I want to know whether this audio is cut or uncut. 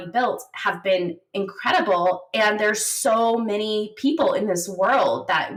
uncut